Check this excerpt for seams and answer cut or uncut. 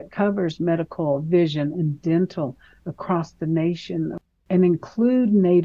cut